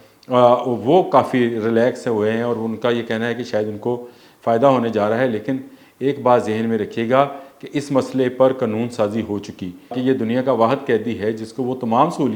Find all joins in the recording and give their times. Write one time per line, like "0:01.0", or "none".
0:09.9